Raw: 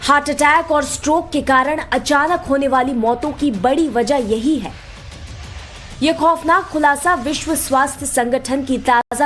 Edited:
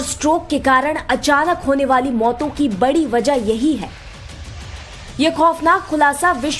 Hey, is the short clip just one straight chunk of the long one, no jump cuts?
yes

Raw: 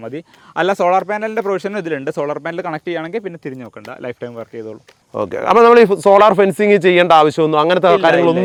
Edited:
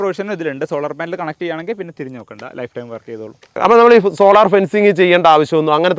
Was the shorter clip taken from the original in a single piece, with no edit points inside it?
no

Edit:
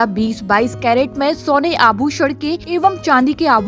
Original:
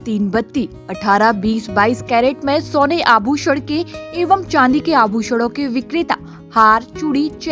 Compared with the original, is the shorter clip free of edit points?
no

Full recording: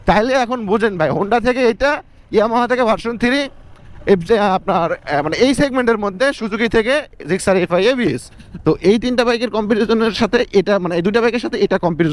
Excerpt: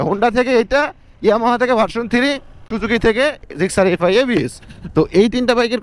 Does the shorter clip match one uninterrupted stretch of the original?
no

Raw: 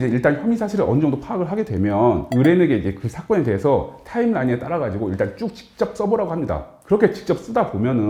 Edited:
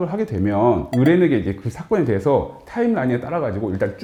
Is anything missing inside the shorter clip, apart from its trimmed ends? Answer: no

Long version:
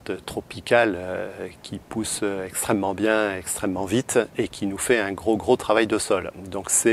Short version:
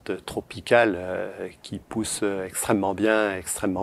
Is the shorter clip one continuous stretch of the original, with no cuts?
yes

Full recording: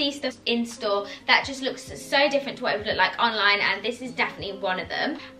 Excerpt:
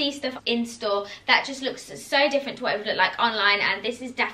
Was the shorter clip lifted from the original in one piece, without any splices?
yes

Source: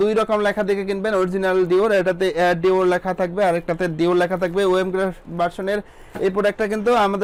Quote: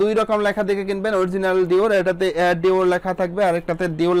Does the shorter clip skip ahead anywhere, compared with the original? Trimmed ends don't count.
no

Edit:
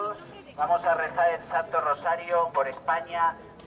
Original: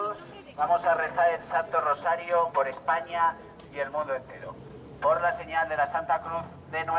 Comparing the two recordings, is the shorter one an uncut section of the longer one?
yes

